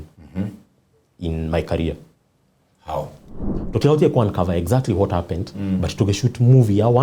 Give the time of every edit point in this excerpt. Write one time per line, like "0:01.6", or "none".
0:03.5